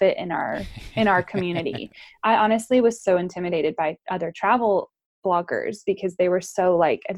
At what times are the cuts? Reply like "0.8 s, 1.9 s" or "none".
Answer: none